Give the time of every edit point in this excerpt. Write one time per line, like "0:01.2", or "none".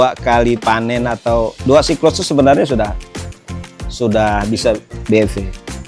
0:01.6